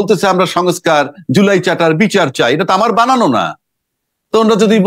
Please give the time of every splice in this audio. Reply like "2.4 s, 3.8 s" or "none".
none